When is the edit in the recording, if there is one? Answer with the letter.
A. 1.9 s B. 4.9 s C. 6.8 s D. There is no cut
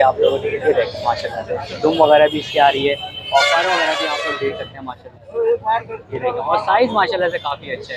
D